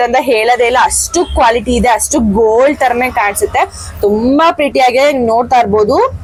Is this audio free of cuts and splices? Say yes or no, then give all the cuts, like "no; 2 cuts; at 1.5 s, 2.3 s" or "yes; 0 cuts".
yes; 0 cuts